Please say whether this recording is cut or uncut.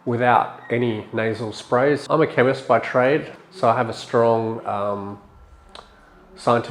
cut